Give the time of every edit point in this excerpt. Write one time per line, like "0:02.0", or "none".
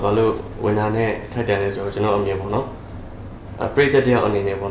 none